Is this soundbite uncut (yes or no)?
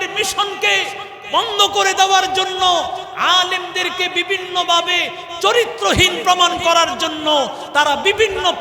yes